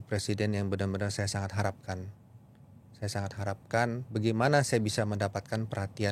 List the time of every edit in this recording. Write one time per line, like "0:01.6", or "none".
none